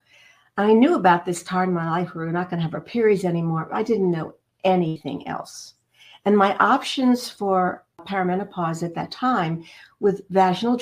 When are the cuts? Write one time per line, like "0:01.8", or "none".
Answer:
0:08.0